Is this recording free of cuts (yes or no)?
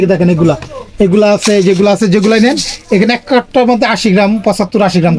yes